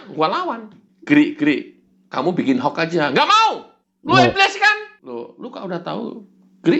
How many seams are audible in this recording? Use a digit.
1